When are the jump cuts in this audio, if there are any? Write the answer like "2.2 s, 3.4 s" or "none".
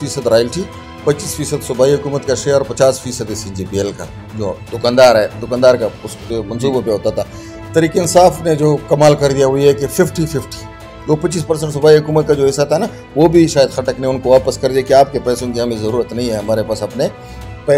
none